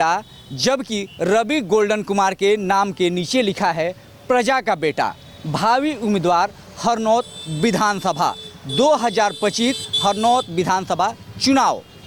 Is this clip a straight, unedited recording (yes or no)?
yes